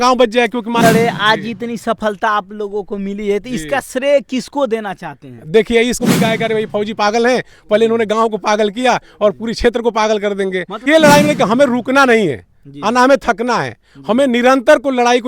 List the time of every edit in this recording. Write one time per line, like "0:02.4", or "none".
0:00.8
0:06.0
0:10.8

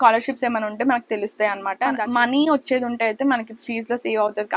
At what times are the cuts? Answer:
0:02.0

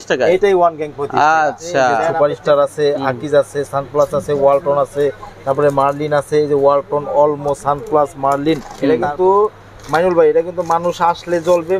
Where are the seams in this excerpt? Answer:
0:02.1
0:08.7

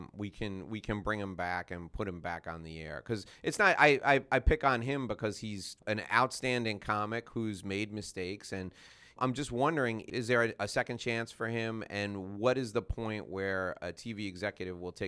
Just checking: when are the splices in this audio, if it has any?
0:05.8
0:09.2
0:10.0

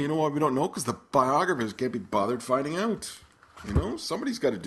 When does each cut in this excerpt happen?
0:02.4

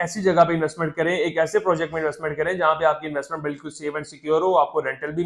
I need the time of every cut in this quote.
none

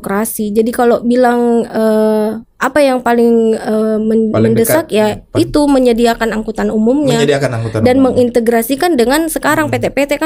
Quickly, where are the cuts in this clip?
none

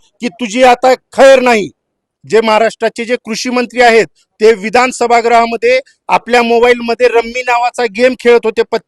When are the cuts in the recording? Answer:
0:02.1

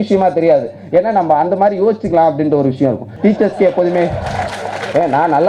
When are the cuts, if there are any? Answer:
0:03.1

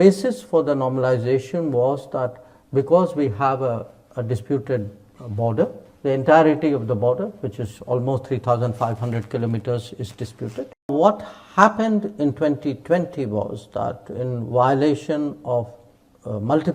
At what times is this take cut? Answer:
0:10.9

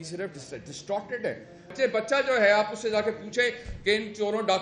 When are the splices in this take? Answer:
0:01.7

